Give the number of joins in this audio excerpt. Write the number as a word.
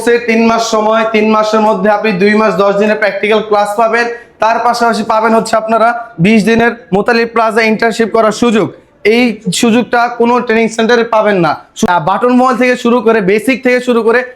one